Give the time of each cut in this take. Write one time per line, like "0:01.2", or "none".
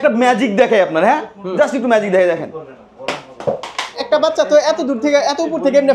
0:04.0